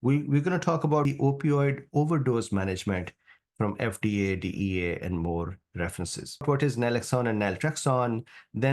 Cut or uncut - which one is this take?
cut